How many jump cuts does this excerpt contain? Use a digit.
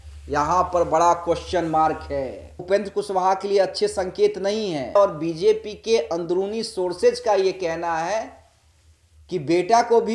2